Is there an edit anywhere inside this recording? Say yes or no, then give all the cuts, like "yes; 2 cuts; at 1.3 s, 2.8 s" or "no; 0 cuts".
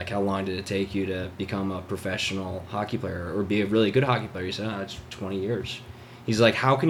no; 0 cuts